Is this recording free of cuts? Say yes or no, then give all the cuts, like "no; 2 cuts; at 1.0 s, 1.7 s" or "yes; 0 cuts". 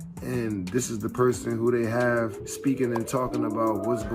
no; 1 cut; at 2.4 s